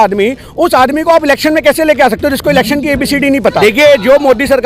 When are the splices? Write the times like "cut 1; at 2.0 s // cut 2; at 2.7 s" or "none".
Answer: cut 1; at 3.6 s